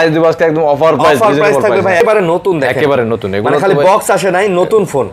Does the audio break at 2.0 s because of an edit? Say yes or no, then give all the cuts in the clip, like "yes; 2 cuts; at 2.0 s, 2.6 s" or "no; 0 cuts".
yes; 1 cut; at 2.0 s